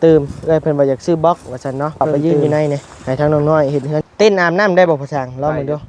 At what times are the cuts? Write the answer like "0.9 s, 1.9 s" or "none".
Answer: 4.0 s